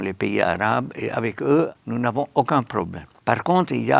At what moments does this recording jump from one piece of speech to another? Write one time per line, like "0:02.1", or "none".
0:01.8
0:03.0